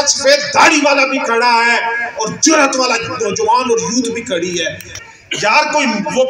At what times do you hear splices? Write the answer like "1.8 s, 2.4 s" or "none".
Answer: 4.8 s